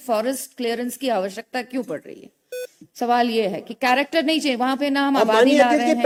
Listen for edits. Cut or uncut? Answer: uncut